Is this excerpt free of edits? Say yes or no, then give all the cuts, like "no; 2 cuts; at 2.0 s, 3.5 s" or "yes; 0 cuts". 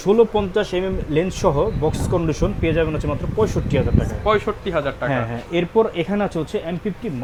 yes; 0 cuts